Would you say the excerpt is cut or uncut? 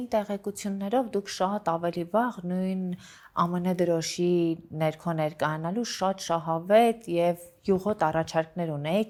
uncut